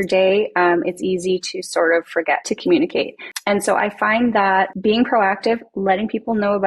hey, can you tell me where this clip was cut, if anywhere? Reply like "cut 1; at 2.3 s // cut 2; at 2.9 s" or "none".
cut 1; at 2.4 s // cut 2; at 3.3 s // cut 3; at 4.7 s

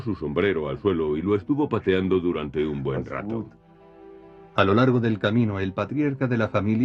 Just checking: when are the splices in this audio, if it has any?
none

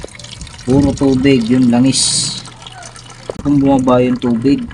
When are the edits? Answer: cut 1; at 3.4 s

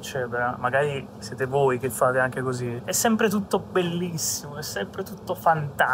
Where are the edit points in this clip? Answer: cut 1; at 2.8 s

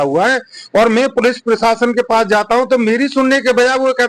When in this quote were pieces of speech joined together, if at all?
none

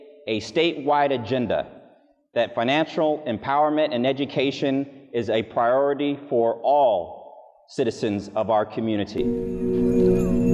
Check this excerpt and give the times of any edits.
cut 1; at 9.2 s

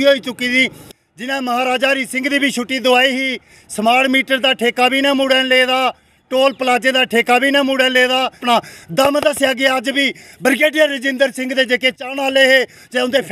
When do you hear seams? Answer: cut 1; at 0.9 s // cut 2; at 8.4 s

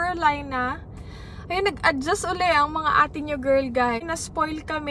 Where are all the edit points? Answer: cut 1; at 4.0 s

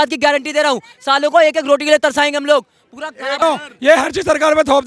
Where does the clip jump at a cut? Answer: cut 1; at 3.4 s

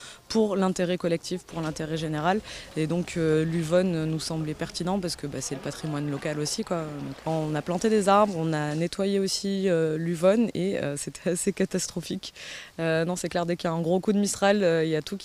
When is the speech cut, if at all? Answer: cut 1; at 12.8 s

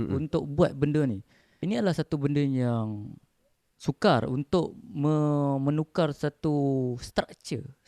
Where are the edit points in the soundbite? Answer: cut 1; at 1.6 s

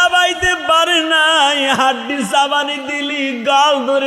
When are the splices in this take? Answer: none

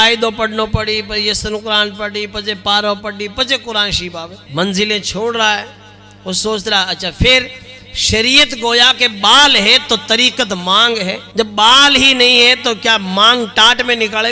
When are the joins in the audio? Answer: cut 1; at 4.3 s // cut 2; at 11.2 s

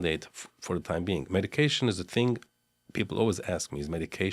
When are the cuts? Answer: none

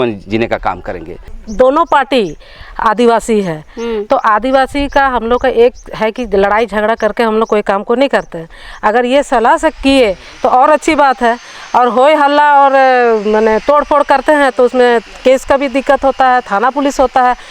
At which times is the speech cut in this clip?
cut 1; at 1.3 s

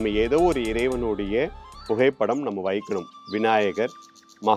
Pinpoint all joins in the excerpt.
none

